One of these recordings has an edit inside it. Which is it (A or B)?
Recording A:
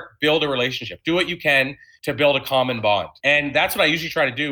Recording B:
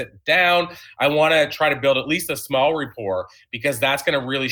A